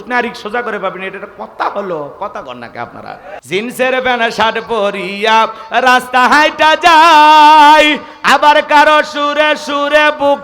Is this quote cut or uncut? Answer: cut